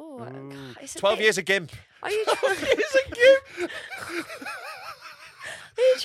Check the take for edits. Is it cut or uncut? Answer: uncut